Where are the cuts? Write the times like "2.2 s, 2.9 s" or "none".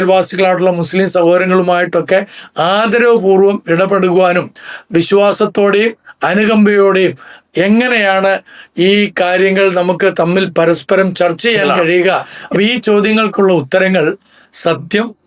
12.3 s